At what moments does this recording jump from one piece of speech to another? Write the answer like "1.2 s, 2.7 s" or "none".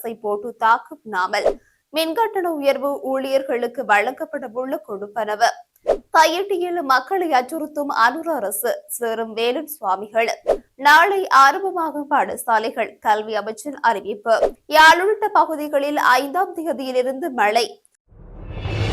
17.7 s